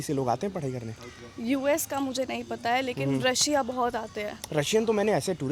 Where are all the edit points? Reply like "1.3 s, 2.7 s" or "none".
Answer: none

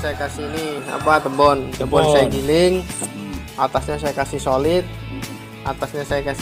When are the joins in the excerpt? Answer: none

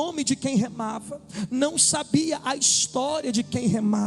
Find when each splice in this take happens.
none

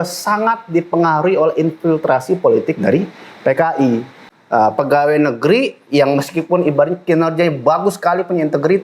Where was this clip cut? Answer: 4.2 s

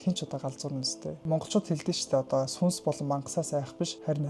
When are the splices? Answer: 1.2 s

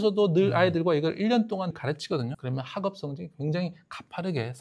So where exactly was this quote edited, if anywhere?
2.3 s

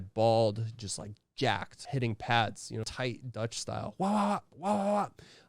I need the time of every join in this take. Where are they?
1.8 s, 2.9 s

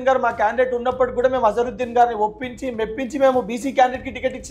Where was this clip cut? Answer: none

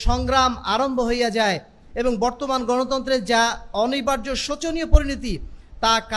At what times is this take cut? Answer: none

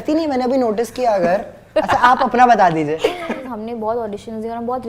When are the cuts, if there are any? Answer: 3.5 s

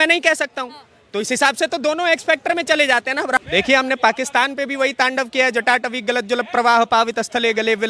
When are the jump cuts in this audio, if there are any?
3.4 s

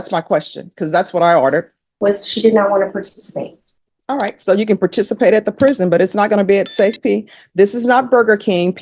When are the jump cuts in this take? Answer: 1.8 s

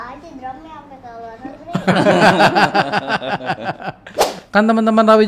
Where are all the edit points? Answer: 4.3 s

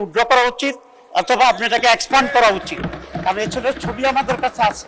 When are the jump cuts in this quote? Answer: none

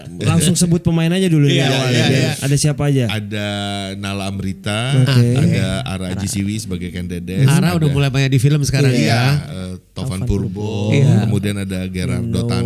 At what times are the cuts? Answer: 2.4 s, 9.5 s

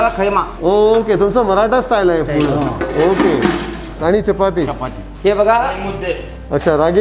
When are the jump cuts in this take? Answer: 3.9 s

